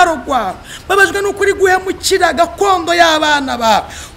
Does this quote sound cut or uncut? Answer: uncut